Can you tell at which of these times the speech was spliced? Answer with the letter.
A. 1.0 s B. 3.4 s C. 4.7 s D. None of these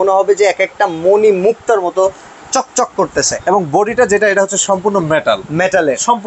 B